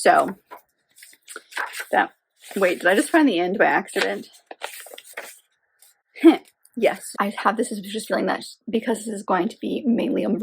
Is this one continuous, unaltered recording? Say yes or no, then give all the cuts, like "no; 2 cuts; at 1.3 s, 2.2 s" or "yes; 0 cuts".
no; 1 cut; at 7.1 s